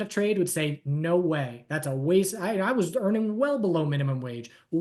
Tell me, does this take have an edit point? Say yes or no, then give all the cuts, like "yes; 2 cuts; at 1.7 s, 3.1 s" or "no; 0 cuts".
no; 0 cuts